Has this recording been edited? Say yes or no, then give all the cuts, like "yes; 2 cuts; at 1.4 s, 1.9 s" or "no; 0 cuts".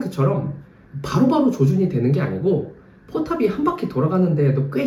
no; 0 cuts